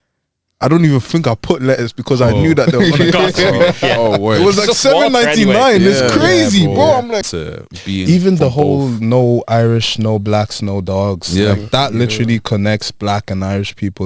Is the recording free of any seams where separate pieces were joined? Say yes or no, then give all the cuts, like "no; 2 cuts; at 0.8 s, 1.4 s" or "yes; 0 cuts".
no; 1 cut; at 7.3 s